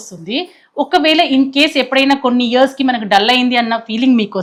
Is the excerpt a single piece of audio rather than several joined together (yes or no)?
yes